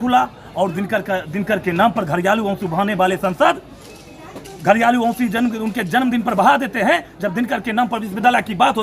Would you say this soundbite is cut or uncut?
uncut